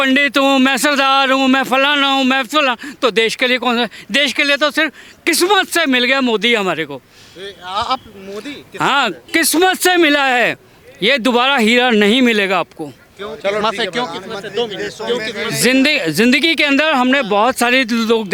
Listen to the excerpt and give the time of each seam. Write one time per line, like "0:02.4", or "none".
none